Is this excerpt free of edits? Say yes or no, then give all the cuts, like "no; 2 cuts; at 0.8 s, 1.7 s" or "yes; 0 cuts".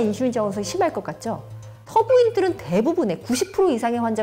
no; 1 cut; at 1.9 s